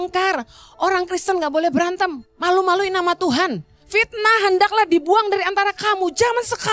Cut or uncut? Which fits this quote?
cut